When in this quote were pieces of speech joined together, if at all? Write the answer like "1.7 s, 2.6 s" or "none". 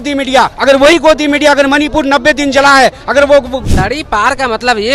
3.5 s